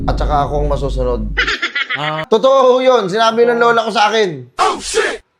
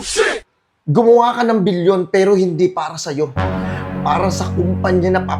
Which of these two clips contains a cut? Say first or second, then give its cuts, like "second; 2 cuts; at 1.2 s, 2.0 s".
first; 1 cut; at 2.2 s